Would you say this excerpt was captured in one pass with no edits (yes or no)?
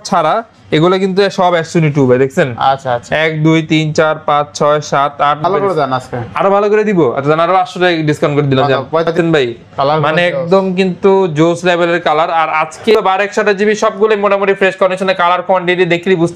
no